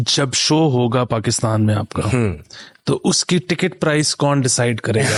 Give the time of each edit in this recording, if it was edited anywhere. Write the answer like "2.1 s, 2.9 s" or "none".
none